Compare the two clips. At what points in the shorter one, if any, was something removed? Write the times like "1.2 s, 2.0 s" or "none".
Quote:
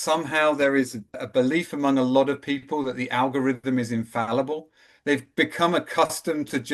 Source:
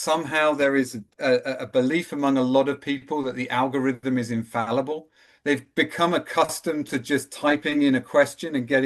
1.1 s

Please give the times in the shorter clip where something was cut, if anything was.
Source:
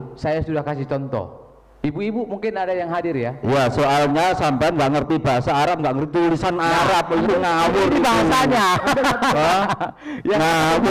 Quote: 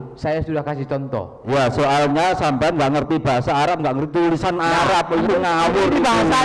1.4 s

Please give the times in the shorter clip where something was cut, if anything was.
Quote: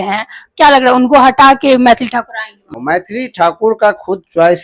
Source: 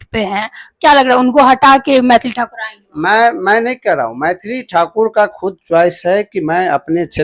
2.7 s

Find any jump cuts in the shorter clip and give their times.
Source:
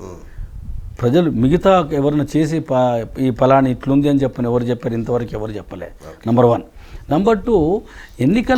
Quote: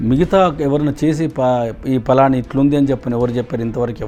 none

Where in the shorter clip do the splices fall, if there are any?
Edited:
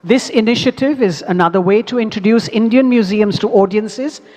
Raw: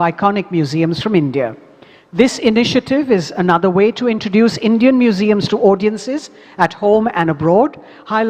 none

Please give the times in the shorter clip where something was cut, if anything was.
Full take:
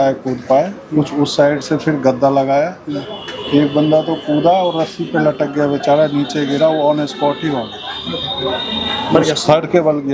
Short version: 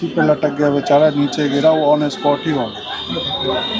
none

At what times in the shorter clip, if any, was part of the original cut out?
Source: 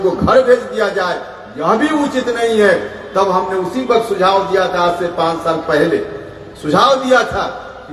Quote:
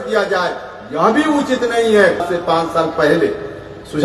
2.3 s

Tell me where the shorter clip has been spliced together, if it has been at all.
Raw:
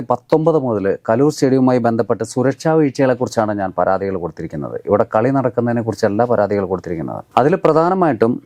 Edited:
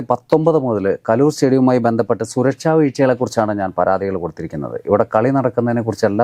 none

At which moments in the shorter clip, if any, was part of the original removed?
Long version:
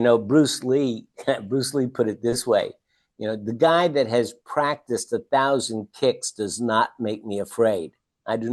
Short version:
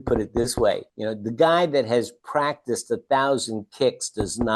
0.9 s

